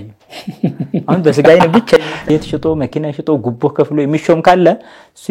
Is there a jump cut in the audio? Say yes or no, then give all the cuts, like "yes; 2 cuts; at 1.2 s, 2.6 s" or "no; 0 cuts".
yes; 1 cut; at 2.0 s